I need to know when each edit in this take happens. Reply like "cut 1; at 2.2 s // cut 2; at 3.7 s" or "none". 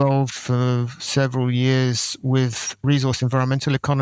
cut 1; at 0.9 s

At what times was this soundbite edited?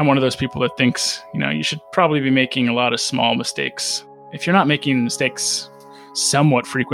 none

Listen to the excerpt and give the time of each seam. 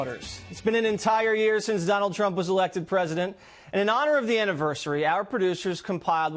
none

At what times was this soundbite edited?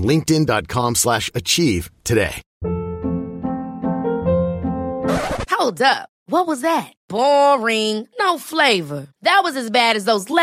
cut 1; at 2.4 s

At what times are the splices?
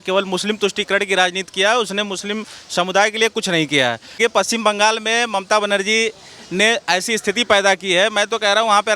cut 1; at 4.1 s

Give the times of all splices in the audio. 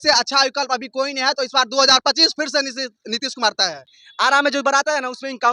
cut 1; at 4.0 s

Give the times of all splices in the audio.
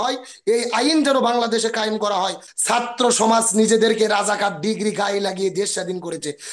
cut 1; at 2.4 s

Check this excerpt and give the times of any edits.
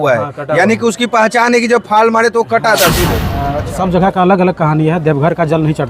cut 1; at 3.5 s

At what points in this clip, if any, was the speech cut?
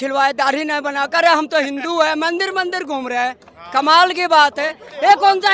none

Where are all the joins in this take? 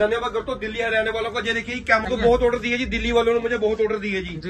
cut 1; at 2.1 s

